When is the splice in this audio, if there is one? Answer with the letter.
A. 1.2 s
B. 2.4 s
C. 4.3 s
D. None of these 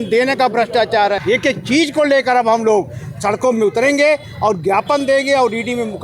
A